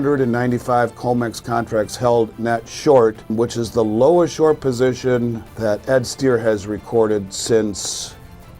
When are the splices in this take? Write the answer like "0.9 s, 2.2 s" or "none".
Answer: 3.3 s, 5.5 s